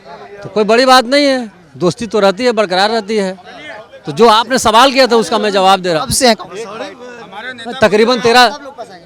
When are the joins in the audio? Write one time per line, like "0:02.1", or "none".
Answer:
none